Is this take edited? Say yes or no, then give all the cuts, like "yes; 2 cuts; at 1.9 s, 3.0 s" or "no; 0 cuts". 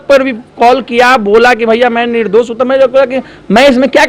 no; 0 cuts